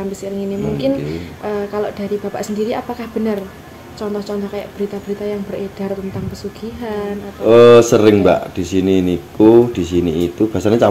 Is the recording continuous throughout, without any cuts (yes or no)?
no